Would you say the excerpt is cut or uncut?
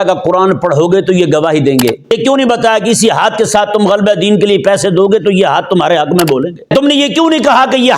cut